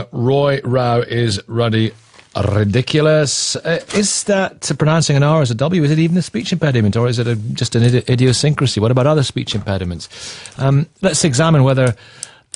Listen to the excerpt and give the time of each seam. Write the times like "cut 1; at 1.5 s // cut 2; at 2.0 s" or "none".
cut 1; at 2.8 s